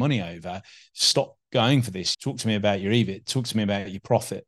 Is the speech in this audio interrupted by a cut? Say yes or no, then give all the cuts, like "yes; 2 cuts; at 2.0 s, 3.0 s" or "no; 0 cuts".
no; 0 cuts